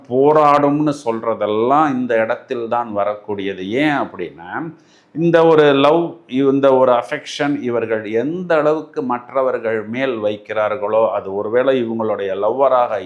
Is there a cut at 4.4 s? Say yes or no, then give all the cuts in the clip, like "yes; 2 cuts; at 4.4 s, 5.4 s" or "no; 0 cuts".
no; 0 cuts